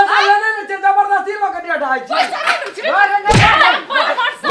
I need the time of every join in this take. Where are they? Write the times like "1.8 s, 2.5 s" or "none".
none